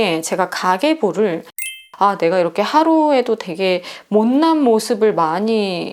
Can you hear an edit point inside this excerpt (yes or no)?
yes